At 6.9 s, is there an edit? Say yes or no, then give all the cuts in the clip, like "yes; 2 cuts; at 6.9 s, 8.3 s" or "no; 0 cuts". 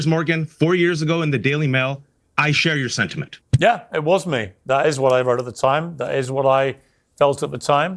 no; 1 cut; at 3.4 s